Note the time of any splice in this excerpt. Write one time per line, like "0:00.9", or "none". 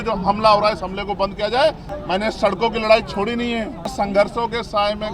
0:01.9
0:03.9